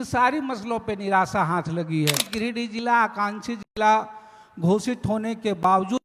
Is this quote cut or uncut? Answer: cut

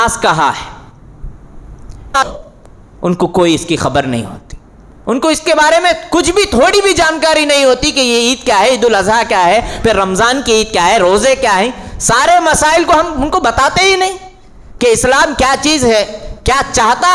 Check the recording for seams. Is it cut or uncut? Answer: cut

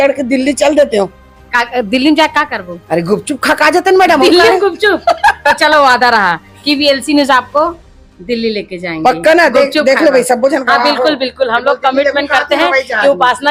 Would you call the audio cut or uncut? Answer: uncut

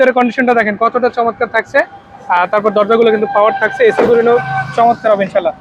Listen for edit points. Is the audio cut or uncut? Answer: uncut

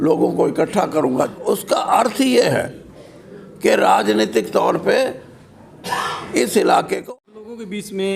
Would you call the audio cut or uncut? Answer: cut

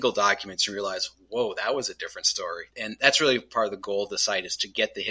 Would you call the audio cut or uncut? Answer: cut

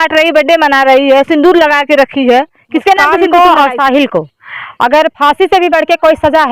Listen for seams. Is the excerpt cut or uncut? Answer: cut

